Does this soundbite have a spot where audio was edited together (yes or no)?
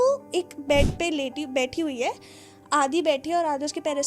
no